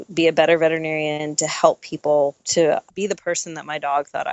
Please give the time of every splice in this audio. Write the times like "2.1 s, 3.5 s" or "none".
2.5 s